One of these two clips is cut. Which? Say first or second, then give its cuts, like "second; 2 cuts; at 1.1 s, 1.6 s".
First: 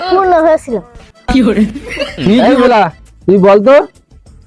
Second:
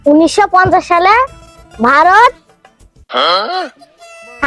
first; 1 cut; at 2.4 s